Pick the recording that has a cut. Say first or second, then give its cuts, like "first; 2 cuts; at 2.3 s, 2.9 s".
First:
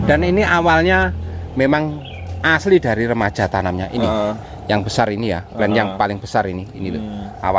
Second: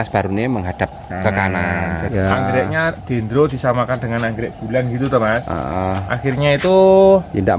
second; 1 cut; at 2.1 s